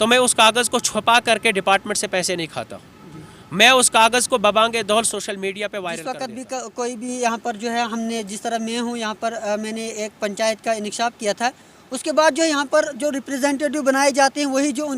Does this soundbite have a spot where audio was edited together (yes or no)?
yes